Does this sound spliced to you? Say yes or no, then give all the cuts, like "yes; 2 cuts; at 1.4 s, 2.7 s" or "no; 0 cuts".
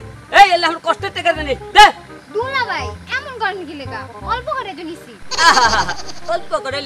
no; 0 cuts